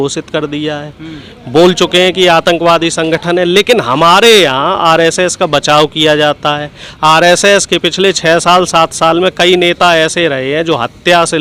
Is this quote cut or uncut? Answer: uncut